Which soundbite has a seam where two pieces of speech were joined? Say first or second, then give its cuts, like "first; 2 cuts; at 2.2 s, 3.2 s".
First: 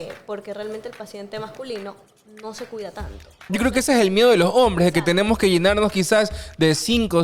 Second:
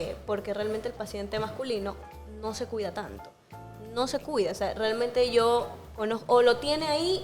first; 1 cut; at 3.4 s